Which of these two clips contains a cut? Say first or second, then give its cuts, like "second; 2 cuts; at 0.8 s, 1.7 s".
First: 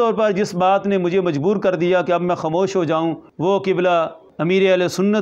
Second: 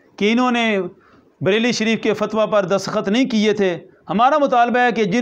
first; 2 cuts; at 3.3 s, 4.2 s